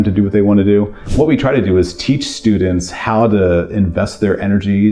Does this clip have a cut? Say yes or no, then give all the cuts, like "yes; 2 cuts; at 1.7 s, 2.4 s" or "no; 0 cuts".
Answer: yes; 1 cut; at 1.0 s